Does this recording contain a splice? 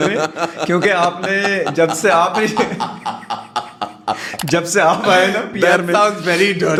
no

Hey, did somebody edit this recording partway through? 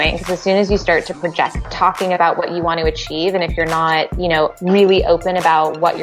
yes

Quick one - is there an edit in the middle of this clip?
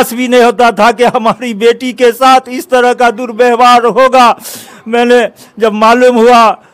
no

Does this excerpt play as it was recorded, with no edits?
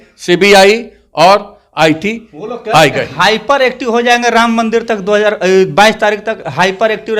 yes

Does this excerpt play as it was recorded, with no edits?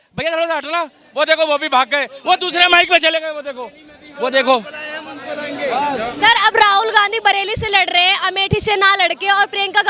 yes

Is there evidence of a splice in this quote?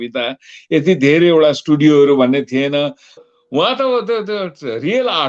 yes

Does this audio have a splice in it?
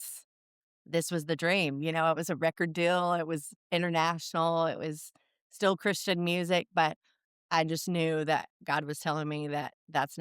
no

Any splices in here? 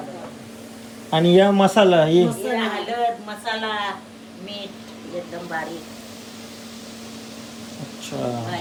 no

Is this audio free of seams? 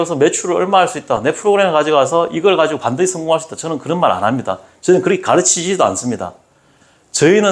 yes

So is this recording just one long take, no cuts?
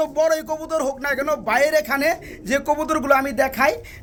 yes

